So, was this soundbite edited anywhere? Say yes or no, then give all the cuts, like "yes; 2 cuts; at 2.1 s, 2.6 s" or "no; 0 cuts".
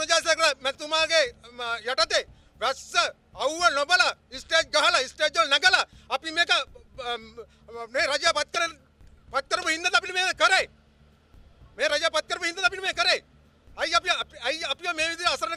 no; 0 cuts